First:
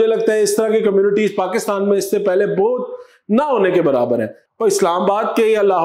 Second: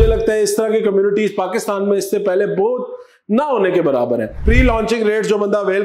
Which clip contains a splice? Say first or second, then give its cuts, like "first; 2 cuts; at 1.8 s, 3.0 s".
second; 1 cut; at 4.5 s